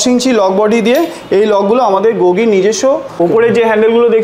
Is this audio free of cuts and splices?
no; 1 cut; at 3.2 s

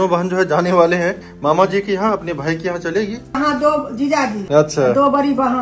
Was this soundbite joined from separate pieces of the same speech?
yes; 2 cuts; at 3.3 s, 4.4 s

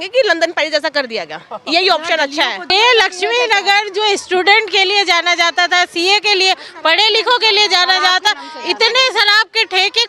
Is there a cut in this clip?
yes; 1 cut; at 2.7 s

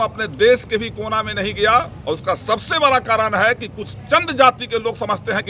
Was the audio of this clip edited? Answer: no; 0 cuts

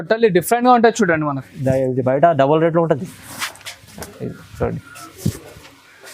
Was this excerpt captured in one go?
yes; 0 cuts

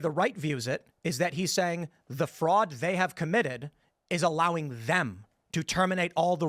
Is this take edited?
no; 0 cuts

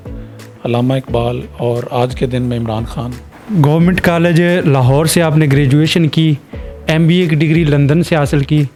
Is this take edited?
no; 0 cuts

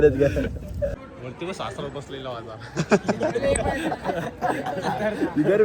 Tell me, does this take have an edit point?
yes; 1 cut; at 1.0 s

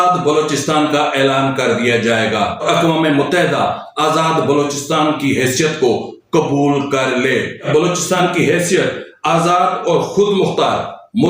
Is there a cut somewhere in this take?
yes; 2 cuts; at 2.6 s, 7.6 s

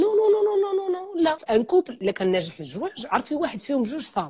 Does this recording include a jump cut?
yes; 2 cuts; at 1.4 s, 1.9 s

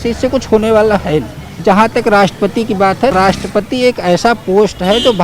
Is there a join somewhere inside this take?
yes; 2 cuts; at 1.4 s, 3.1 s

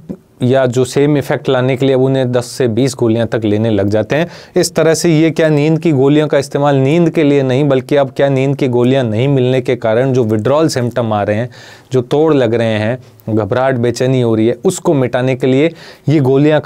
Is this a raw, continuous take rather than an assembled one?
yes; 0 cuts

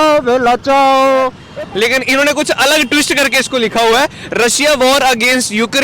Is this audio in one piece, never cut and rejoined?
no; 1 cut; at 1.4 s

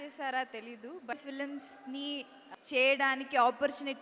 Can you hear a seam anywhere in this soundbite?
yes; 2 cuts; at 1.1 s, 2.4 s

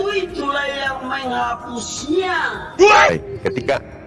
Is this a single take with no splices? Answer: no; 1 cut; at 3.1 s

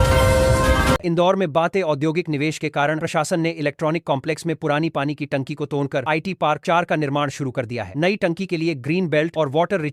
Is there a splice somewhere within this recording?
no; 0 cuts

